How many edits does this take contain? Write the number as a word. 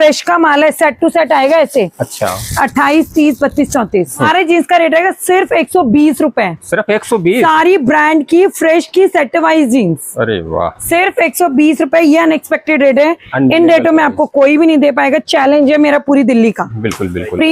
one